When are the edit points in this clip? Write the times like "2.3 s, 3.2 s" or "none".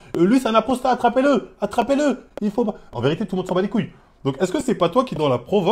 none